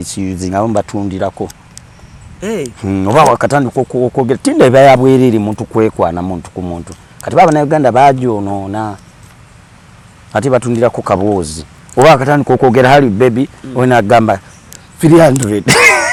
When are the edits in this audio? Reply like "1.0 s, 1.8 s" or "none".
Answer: none